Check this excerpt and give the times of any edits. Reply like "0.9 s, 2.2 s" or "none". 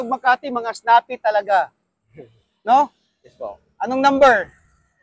1.7 s